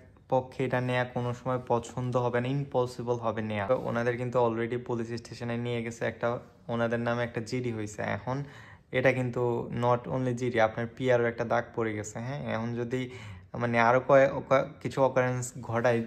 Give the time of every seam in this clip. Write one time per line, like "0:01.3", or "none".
0:03.7

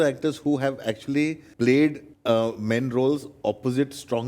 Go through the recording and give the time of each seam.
0:01.4
0:02.1

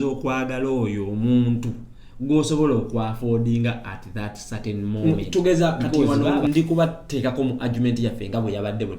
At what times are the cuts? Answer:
0:05.0

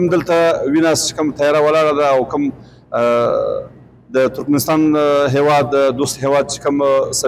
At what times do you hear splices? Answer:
none

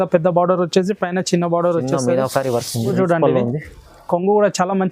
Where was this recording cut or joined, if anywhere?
0:02.9

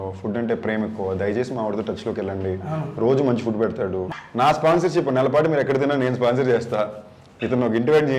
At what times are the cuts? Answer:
0:04.2

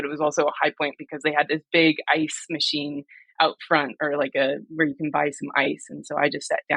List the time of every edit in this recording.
none

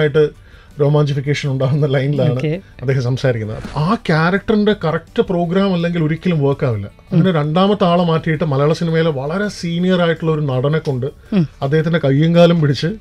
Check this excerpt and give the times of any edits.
0:03.7

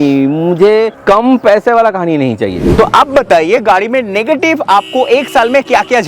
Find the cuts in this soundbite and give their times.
0:01.0
0:02.6

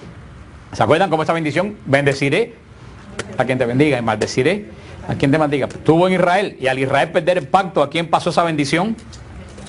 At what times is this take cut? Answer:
0:01.0

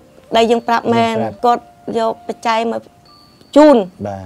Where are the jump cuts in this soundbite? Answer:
0:01.3

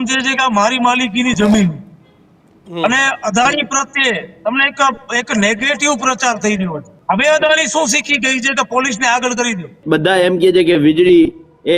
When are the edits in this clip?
0:06.9
0:09.8

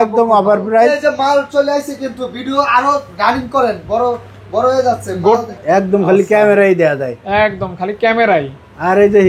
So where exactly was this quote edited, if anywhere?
0:00.9
0:05.5

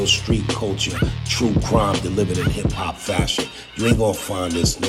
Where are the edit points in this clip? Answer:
none

